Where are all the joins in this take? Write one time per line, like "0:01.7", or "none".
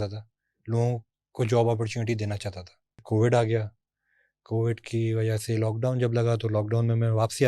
0:03.0